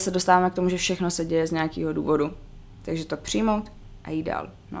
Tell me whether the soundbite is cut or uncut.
uncut